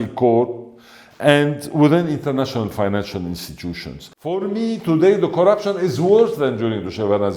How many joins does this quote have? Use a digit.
1